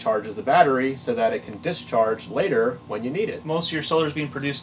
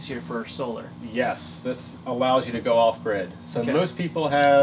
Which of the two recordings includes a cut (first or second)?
first